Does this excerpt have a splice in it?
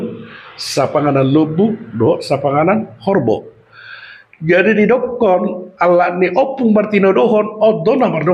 no; 0 cuts

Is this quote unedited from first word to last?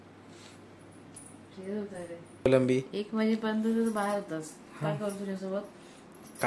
no; 1 cut; at 2.5 s

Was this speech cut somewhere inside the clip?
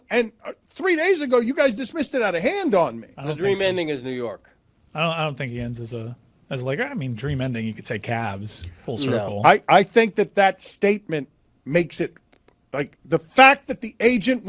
no; 0 cuts

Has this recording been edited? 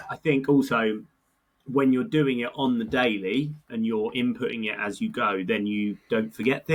no; 0 cuts

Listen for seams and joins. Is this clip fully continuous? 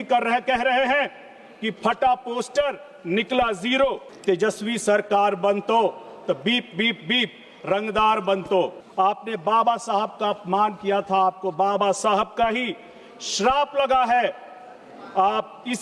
no; 2 cuts; at 4.1 s, 8.8 s

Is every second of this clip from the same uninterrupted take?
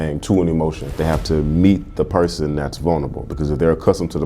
no; 1 cut; at 0.9 s

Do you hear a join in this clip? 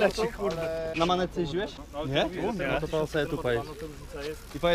yes; 2 cuts; at 0.9 s, 1.8 s

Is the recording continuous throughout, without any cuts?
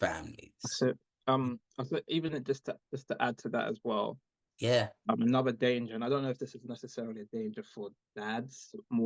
yes; 0 cuts

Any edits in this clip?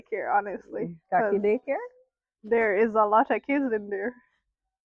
no; 0 cuts

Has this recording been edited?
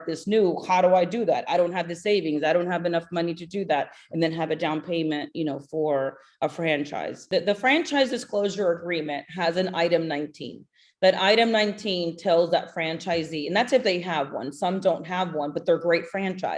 yes; 1 cut; at 7.2 s

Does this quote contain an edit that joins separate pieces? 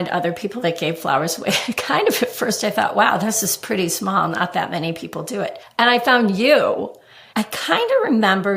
yes; 2 cuts; at 5.6 s, 7.3 s

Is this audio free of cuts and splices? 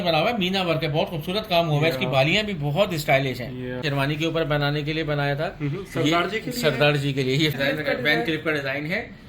no; 2 cuts; at 3.8 s, 7.5 s

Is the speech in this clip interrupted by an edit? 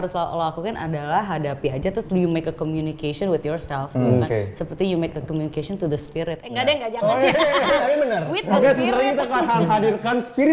no; 0 cuts

